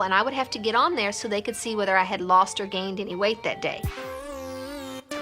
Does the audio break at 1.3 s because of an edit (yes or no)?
no